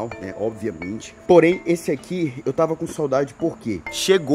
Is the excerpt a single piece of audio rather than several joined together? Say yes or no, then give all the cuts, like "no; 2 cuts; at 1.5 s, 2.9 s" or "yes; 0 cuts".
no; 1 cut; at 1.2 s